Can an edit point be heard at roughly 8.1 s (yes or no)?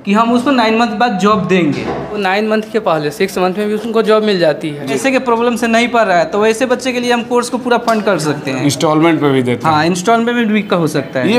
no